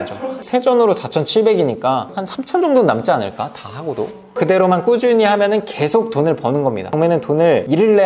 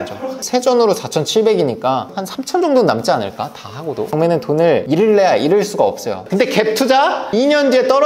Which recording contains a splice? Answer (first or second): second